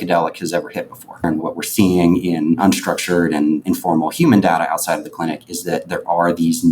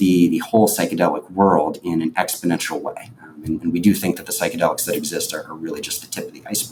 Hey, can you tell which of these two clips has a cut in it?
first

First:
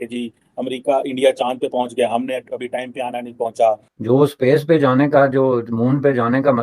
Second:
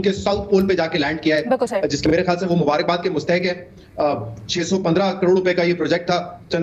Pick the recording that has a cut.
first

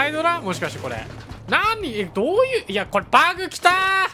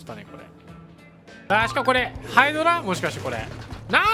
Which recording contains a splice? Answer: second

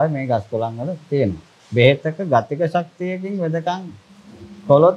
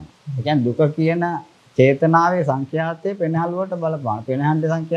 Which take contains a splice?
first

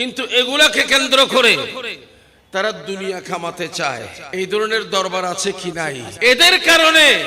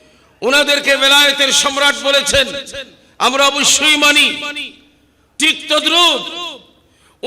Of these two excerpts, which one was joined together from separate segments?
first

